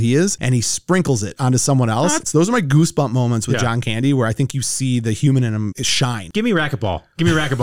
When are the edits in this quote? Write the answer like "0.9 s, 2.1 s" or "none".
2.2 s, 5.8 s